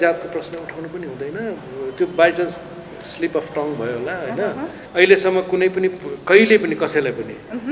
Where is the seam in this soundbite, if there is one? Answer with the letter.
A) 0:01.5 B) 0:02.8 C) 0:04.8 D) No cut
C